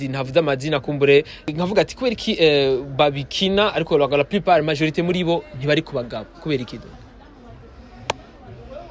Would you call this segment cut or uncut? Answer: cut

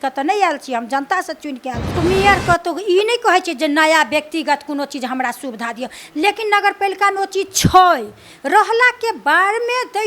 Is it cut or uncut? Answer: cut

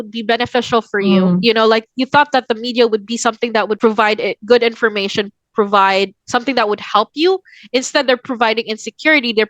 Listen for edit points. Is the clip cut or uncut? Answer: cut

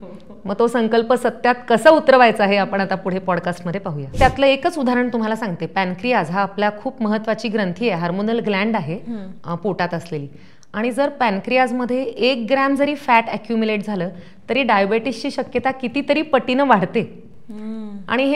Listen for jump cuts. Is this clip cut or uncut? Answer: cut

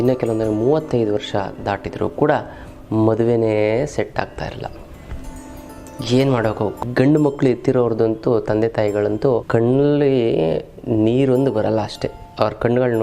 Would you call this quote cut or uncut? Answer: cut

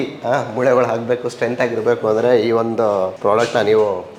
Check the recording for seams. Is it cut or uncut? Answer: uncut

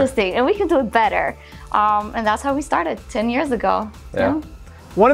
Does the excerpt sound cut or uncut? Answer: uncut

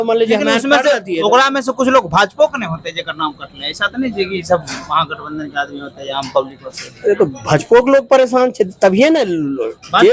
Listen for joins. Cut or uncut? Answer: uncut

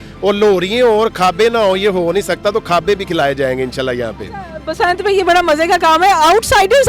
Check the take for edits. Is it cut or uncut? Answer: uncut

